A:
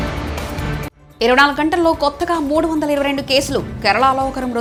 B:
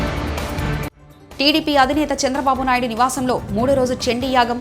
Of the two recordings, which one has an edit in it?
B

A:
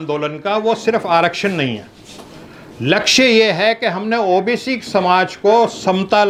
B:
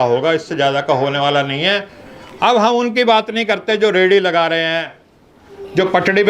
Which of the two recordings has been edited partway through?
B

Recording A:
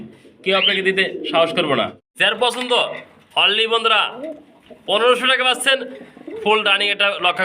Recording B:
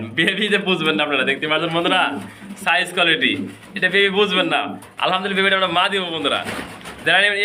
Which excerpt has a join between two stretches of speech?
A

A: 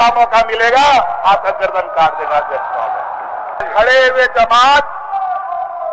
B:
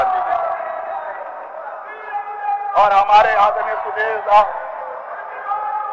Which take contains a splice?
A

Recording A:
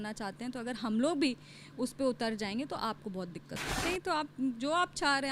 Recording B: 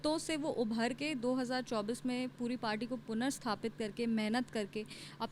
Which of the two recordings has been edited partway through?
A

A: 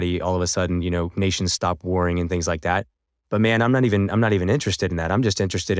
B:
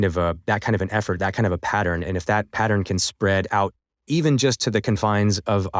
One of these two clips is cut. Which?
B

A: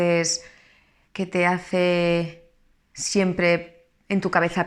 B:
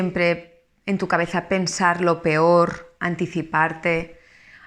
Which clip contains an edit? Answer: B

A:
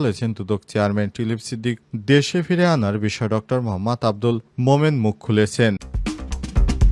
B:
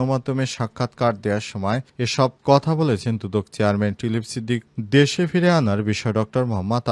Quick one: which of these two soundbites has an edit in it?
A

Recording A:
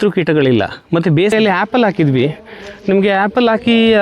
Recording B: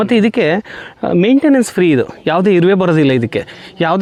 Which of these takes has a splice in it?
A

